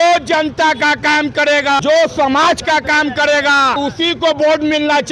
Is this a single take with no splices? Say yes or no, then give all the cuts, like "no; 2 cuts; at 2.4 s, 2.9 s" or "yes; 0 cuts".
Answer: no; 2 cuts; at 1.8 s, 3.8 s